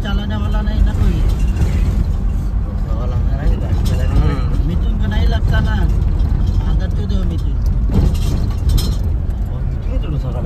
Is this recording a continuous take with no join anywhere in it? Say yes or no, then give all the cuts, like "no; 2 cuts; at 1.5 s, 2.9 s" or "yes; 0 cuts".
yes; 0 cuts